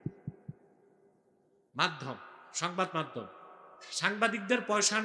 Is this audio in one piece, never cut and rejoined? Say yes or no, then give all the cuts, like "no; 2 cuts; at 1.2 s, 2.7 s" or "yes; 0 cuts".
yes; 0 cuts